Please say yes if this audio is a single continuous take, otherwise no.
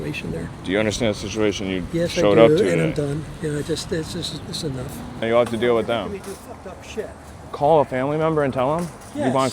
no